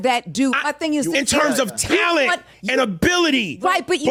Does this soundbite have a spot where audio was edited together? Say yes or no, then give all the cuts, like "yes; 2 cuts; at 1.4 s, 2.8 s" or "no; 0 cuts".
no; 0 cuts